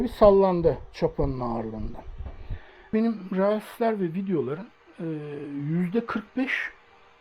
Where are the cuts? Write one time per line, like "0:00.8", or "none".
0:02.9